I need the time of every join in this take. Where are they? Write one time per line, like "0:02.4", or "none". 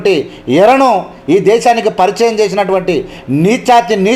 none